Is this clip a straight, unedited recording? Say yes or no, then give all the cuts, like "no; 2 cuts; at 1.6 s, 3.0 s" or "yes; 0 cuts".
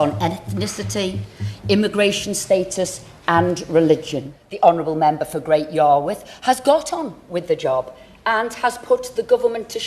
no; 1 cut; at 4.4 s